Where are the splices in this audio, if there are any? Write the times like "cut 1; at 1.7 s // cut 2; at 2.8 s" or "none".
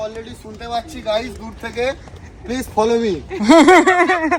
none